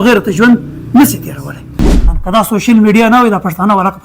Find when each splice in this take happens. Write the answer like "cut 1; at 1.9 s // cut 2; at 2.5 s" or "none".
cut 1; at 2.0 s